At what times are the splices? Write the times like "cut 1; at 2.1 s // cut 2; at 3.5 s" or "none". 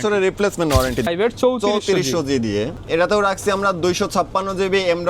cut 1; at 1.1 s // cut 2; at 2.8 s